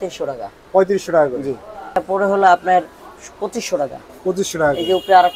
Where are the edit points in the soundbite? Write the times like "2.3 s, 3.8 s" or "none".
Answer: 1.9 s